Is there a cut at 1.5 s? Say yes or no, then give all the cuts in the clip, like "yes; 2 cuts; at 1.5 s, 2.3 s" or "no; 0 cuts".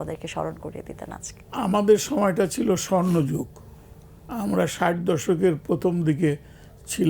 yes; 1 cut; at 1.5 s